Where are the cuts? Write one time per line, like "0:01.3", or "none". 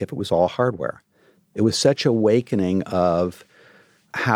0:01.4